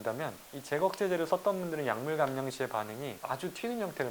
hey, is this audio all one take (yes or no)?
no